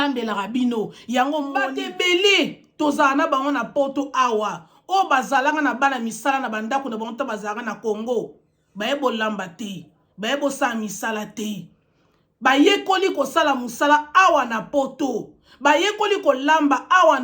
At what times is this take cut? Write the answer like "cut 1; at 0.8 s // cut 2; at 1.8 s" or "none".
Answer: cut 1; at 1.8 s